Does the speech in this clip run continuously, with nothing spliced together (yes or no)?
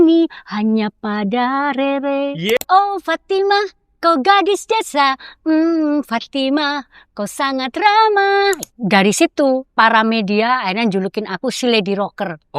no